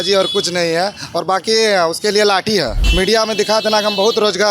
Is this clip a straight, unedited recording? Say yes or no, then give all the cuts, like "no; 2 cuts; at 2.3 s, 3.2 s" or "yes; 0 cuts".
no; 1 cut; at 2.8 s